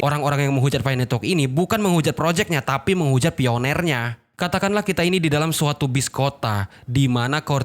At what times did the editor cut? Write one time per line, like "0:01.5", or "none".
0:04.3